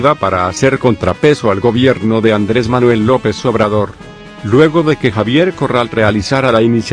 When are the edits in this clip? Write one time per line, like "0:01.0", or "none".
none